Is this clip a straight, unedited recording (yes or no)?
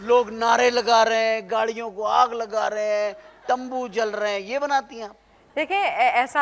yes